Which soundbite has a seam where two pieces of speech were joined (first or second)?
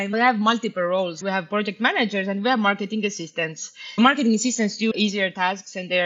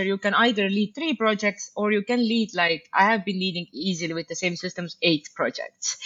first